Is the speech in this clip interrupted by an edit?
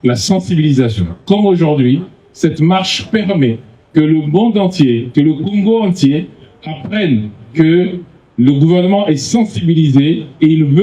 no; 0 cuts

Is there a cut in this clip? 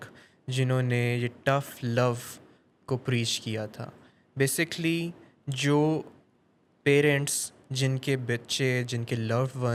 no; 0 cuts

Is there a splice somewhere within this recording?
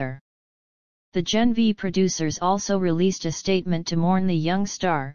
no; 0 cuts

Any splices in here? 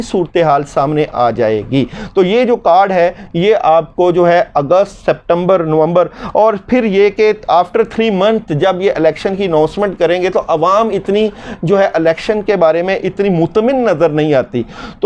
no; 0 cuts

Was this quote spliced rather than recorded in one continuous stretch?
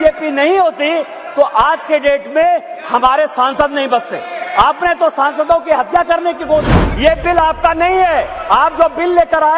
yes; 1 cut; at 6.8 s

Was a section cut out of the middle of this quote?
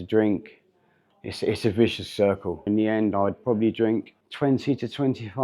yes; 2 cuts; at 2.6 s, 4.2 s

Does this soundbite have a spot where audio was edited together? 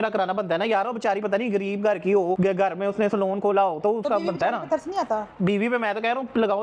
no; 0 cuts

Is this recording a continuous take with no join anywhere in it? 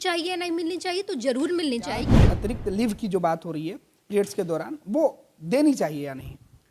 no; 1 cut; at 2.1 s

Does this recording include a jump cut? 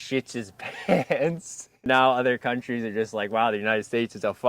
yes; 1 cut; at 1.8 s

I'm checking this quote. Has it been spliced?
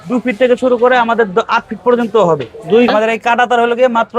yes; 1 cut; at 2.9 s

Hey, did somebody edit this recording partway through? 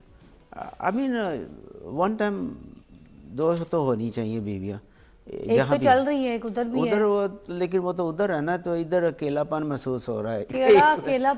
no; 0 cuts

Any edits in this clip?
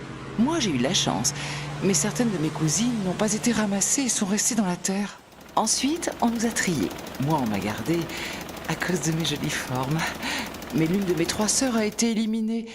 yes; 1 cut; at 7.8 s

